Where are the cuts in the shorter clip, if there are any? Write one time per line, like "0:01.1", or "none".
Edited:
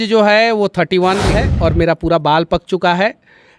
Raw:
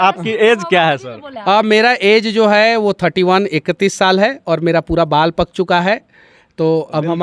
0:01.4